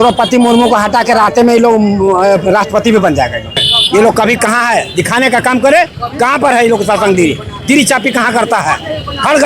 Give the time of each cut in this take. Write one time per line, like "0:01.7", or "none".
0:03.7